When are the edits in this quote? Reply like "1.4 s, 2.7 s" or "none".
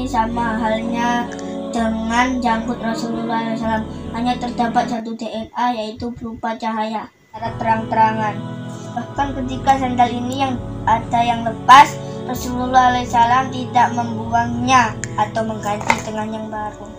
7.5 s